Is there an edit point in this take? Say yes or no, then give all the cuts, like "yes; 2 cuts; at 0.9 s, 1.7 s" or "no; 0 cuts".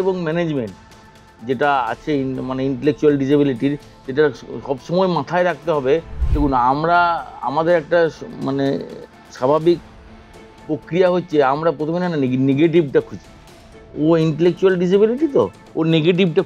no; 0 cuts